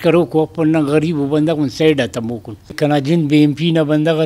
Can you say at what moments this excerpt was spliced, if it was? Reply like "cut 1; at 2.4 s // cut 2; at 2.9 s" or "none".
cut 1; at 2.8 s